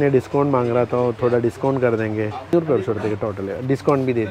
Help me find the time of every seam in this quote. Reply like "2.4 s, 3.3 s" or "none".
2.5 s